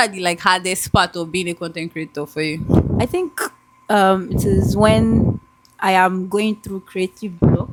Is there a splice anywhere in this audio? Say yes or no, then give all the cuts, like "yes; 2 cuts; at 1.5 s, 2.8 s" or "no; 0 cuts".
no; 0 cuts